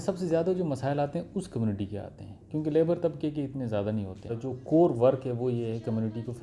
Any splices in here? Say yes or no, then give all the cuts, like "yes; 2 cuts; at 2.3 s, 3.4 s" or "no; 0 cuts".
yes; 1 cut; at 4.4 s